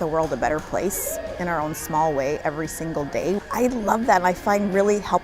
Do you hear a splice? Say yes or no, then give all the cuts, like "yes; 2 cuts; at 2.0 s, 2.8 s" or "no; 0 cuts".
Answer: yes; 1 cut; at 3.4 s